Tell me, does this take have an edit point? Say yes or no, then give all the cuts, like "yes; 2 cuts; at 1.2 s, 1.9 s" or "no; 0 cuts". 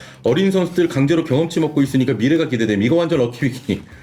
no; 0 cuts